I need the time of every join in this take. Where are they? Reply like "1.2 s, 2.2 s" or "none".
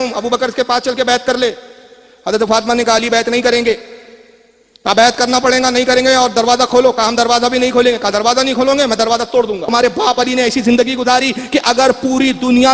9.7 s